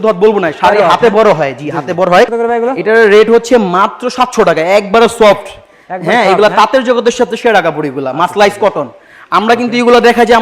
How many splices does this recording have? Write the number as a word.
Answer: one